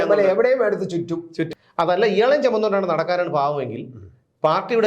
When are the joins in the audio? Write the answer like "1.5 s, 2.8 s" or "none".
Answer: 1.4 s

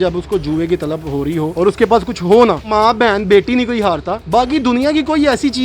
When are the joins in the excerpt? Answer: 1.5 s

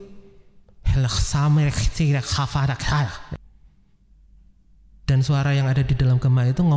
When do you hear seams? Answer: 3.3 s

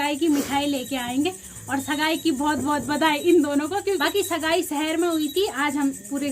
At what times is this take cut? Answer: 4.0 s

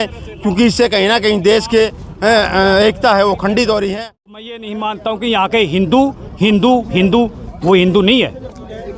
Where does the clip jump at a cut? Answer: 4.4 s

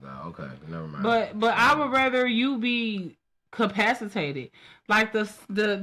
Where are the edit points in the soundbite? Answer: none

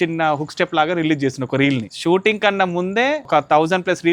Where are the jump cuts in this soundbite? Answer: 1.9 s, 3.3 s

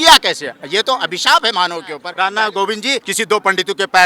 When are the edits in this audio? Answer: 2.1 s, 3.0 s

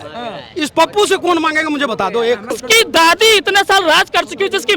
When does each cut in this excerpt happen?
2.6 s

